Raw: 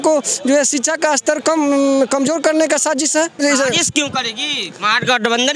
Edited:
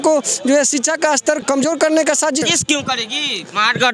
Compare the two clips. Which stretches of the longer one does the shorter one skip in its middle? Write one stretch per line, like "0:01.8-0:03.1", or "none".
0:01.4-0:02.1
0:03.1-0:03.7

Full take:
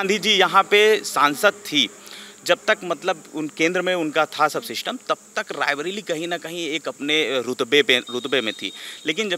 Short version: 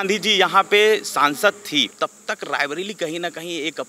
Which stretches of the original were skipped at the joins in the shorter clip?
0:01.9-0:05.0

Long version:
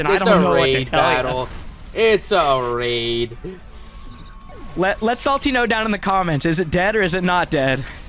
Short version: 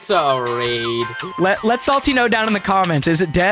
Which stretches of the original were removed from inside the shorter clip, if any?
0:03.4-0:04.6

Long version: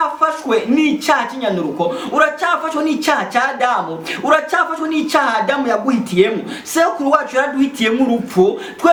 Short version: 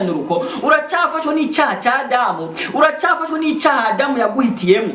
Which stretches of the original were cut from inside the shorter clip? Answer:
none

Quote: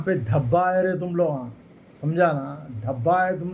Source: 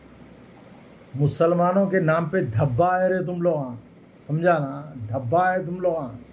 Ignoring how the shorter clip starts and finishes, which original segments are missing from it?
none

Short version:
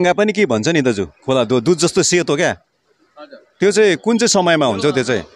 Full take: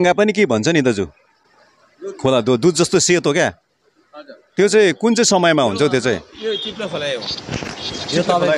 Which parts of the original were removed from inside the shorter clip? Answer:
0:01.1-0:02.1

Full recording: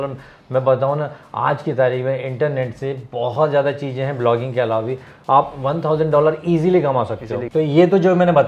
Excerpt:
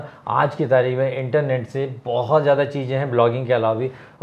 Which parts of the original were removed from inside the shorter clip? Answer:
none

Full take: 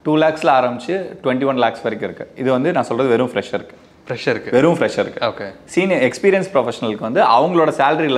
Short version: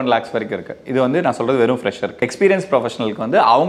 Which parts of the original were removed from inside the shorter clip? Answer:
0:03.8-0:06.1

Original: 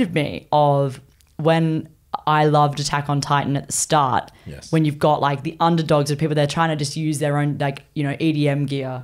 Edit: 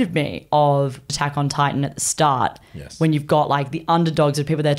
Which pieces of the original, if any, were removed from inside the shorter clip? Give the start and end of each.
0:01.1-0:02.9

